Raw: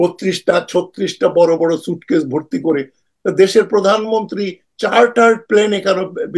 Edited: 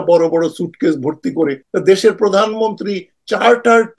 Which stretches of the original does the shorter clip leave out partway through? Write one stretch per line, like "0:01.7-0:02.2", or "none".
0:02.9-0:03.1